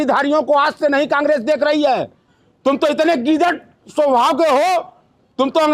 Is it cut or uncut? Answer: uncut